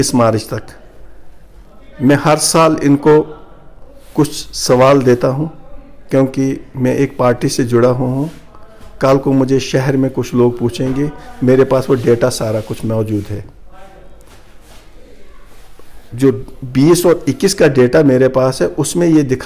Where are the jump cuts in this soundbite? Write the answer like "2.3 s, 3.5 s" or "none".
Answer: none